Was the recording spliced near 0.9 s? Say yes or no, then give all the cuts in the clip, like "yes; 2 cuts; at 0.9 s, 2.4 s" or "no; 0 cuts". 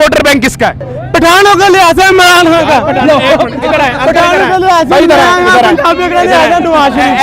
yes; 1 cut; at 0.9 s